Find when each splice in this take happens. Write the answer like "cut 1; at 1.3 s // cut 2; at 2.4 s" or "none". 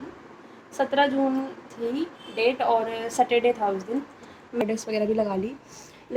cut 1; at 4.6 s